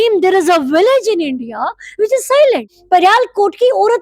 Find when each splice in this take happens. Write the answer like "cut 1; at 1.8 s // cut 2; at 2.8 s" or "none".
cut 1; at 2.7 s